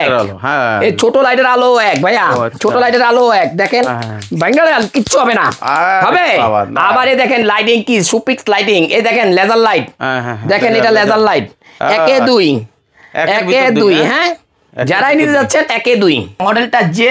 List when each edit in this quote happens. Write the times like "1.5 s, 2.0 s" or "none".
none